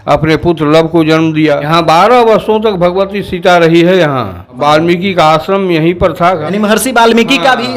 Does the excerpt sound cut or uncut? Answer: cut